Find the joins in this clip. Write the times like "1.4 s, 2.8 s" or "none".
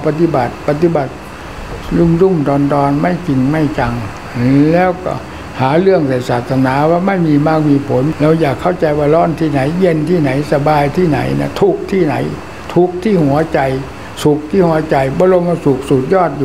8.1 s